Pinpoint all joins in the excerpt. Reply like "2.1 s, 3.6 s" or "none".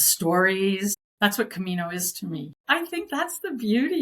1.0 s, 2.6 s